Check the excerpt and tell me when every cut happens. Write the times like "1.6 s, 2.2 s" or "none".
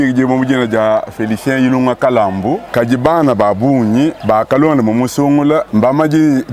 2.6 s, 4.2 s, 5.7 s